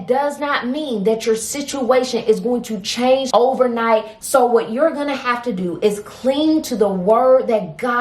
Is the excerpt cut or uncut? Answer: cut